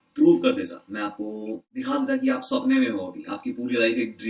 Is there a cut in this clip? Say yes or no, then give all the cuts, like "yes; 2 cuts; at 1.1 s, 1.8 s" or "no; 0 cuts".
yes; 1 cut; at 1.7 s